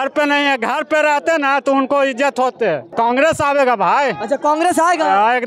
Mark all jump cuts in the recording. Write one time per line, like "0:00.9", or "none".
0:02.9